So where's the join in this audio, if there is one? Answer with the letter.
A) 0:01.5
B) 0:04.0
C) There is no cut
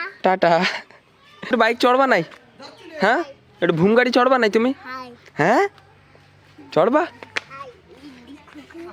A